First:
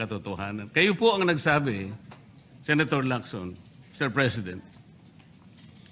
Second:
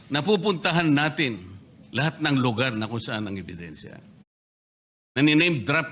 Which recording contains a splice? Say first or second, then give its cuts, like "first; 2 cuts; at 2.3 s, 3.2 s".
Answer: second; 1 cut; at 4.8 s